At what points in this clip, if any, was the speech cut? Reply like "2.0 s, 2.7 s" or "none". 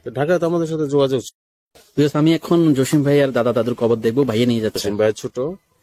1.3 s, 4.8 s